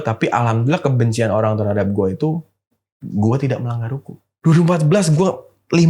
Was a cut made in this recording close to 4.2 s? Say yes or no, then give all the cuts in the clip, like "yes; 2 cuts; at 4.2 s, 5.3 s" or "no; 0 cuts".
yes; 1 cut; at 4.2 s